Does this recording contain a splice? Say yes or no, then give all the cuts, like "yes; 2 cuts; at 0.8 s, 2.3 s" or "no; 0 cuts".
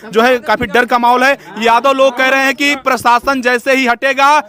no; 0 cuts